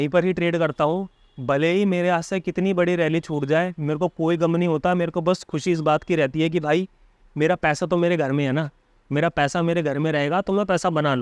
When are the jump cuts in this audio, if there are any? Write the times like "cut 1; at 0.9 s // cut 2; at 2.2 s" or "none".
none